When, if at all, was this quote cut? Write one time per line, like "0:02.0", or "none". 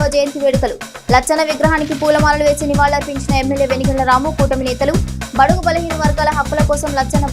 none